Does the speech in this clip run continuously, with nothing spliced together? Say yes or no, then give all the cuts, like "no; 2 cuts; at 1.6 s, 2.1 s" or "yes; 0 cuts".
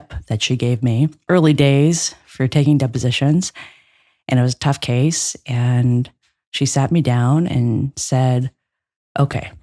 no; 1 cut; at 1.2 s